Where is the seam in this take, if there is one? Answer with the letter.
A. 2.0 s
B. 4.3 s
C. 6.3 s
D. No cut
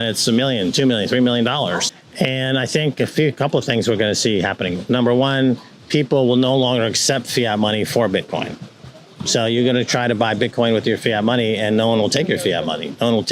A